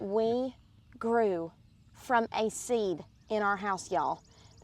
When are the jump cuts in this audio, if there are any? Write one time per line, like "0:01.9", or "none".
none